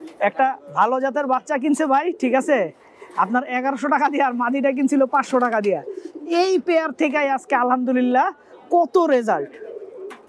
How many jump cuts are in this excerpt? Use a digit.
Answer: 0